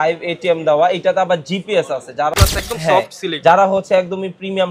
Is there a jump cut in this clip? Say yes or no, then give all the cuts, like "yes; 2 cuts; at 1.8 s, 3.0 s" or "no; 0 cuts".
yes; 1 cut; at 2.3 s